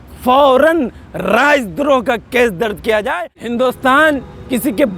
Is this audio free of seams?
no; 1 cut; at 3.3 s

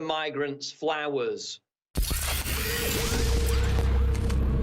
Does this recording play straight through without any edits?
no; 1 cut; at 2.0 s

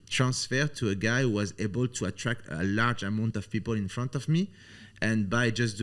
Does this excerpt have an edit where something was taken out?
no; 0 cuts

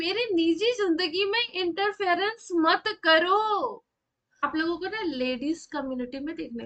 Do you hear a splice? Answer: yes; 1 cut; at 4.5 s

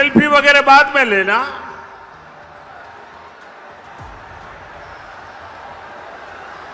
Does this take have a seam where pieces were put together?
no; 0 cuts

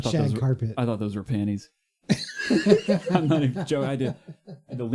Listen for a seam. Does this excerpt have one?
no; 0 cuts

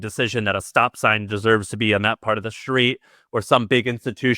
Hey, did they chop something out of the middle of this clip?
no; 0 cuts

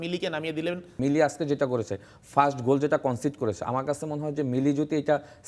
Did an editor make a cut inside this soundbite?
yes; 1 cut; at 1.0 s

